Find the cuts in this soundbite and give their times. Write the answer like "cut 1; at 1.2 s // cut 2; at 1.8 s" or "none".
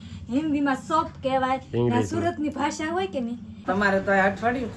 cut 1; at 3.6 s

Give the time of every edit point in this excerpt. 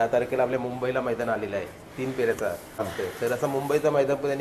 cut 1; at 2.9 s

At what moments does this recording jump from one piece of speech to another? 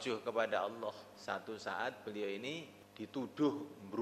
cut 1; at 1.1 s // cut 2; at 2.8 s

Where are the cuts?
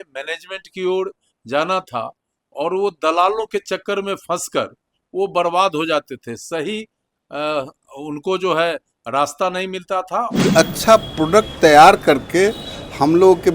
cut 1; at 10.3 s

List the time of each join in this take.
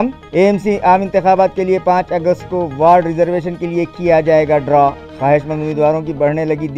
none

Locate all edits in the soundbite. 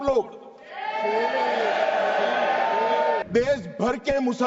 cut 1; at 3.2 s

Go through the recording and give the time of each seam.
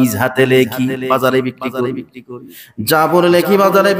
none

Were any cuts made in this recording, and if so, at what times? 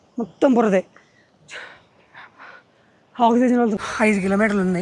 cut 1; at 3.8 s

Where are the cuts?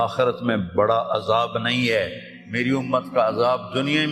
none

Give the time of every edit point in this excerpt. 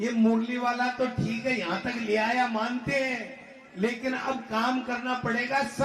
none

